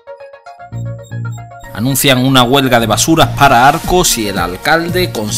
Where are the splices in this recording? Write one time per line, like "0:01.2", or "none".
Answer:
0:01.4